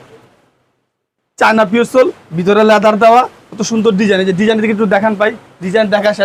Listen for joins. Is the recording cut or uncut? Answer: uncut